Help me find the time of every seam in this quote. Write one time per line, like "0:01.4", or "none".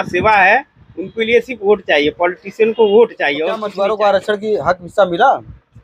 0:03.7